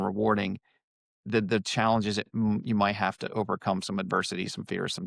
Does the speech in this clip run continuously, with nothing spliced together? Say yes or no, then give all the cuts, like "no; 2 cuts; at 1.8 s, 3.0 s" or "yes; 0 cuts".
yes; 0 cuts